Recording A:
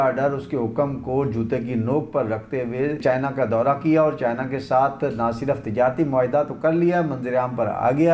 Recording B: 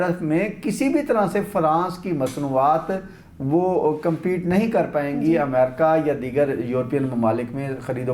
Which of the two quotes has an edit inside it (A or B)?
A